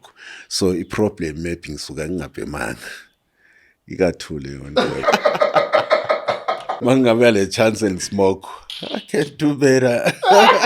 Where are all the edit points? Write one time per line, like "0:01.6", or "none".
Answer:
0:05.0
0:06.7